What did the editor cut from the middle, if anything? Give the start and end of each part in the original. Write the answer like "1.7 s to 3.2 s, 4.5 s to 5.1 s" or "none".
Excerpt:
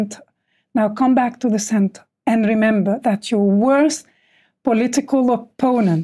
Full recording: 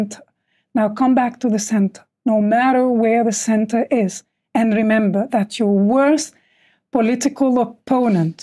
2.1 s to 4.3 s